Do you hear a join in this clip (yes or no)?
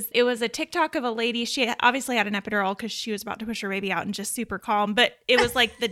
no